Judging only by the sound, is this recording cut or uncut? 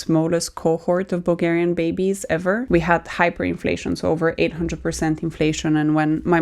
cut